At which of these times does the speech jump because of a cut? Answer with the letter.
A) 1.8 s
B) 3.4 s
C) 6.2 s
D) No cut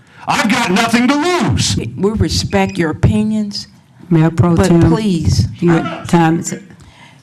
A